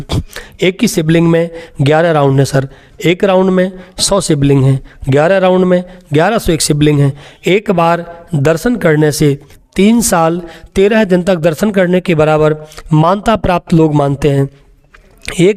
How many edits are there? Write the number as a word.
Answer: zero